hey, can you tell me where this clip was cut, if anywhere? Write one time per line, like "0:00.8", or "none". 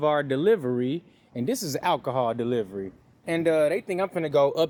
none